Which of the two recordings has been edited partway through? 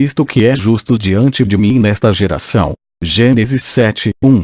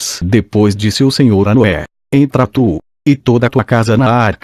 first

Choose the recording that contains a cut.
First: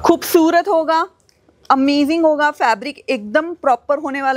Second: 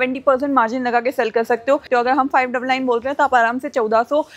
second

